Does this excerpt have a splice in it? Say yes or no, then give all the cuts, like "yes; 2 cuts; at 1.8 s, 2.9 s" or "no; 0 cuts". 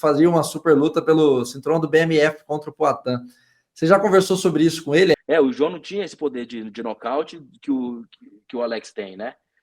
yes; 1 cut; at 5.1 s